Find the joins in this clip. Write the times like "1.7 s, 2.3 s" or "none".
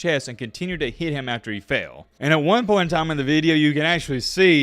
2.0 s